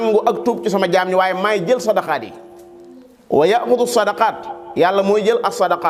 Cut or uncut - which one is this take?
uncut